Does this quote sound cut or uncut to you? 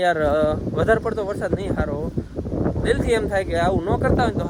uncut